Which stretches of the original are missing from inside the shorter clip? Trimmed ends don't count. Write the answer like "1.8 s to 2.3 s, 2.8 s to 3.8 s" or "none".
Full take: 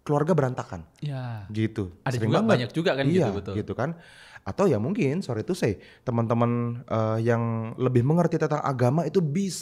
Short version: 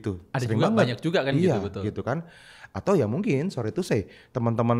none